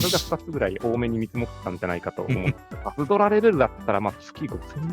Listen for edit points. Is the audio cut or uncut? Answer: uncut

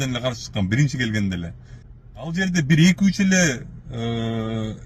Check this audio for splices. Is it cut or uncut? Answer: cut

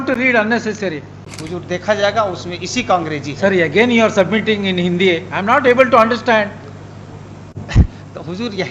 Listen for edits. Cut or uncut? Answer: cut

